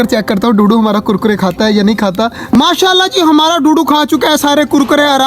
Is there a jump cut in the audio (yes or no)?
yes